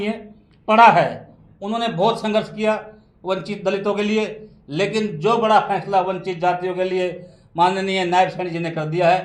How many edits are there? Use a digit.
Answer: 0